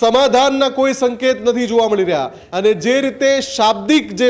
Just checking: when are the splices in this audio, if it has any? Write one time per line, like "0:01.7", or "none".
0:02.4

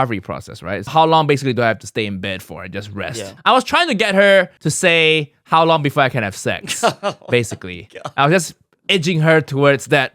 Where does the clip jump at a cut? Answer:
0:00.9
0:03.2
0:04.6

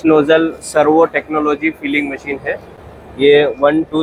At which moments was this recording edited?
none

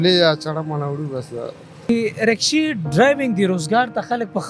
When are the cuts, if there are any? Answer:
0:01.9

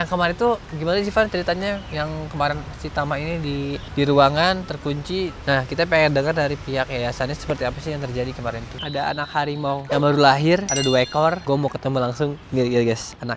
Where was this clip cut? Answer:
0:05.4
0:08.7
0:11.4

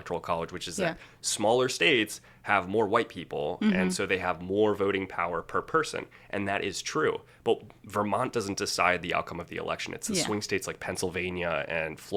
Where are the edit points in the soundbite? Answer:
none

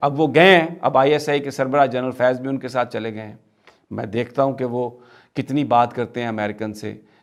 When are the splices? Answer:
none

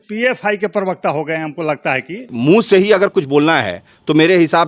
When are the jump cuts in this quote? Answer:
0:02.3

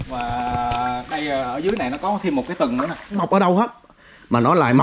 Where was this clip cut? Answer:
0:03.2

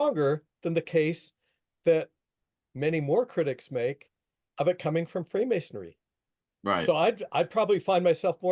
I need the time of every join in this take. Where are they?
none

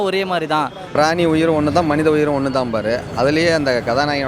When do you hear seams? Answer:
0:01.0

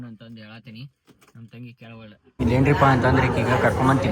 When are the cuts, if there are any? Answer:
0:02.2

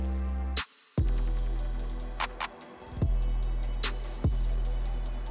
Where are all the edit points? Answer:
none

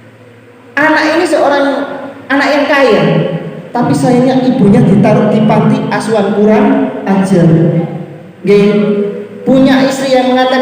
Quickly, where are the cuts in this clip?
0:08.3

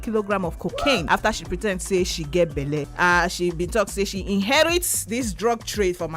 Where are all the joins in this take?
0:01.0
0:02.9

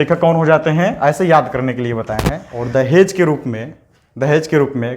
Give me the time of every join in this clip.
0:02.5

